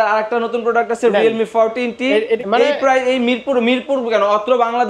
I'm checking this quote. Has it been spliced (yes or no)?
yes